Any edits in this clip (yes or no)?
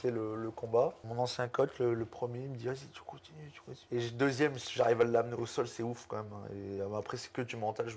yes